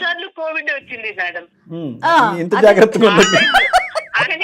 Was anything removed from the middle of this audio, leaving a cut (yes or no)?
no